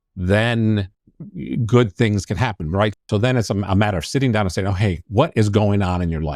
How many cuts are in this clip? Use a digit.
2